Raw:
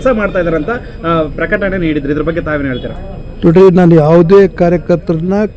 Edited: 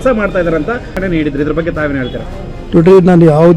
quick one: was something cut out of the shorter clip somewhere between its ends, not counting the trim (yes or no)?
yes